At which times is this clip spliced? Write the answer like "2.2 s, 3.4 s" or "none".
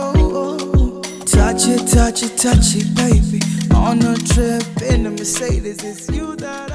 none